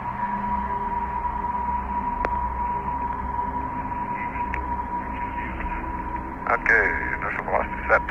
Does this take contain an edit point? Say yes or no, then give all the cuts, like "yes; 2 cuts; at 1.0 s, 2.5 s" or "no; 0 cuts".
yes; 1 cut; at 6.4 s